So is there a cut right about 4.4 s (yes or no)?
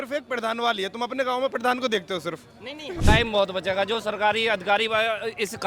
no